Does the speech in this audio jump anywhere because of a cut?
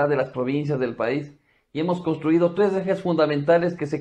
yes; 1 cut; at 3.0 s

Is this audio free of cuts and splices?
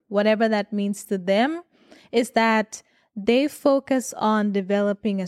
yes; 0 cuts

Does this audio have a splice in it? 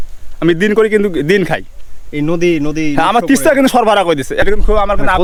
no; 0 cuts

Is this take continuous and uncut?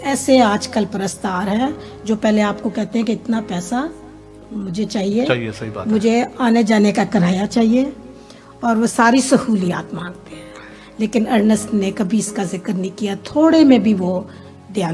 yes; 0 cuts

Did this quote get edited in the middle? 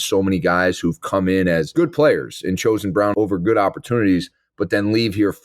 yes; 2 cuts; at 1.7 s, 3.1 s

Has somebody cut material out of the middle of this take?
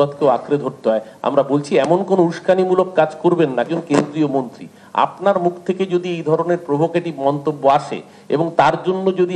no; 0 cuts

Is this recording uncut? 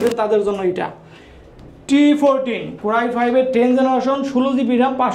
yes; 0 cuts

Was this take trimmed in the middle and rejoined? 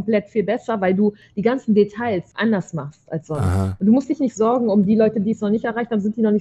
yes; 2 cuts; at 2.3 s, 3.7 s

